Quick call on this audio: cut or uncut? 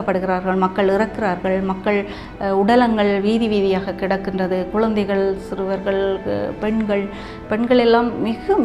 uncut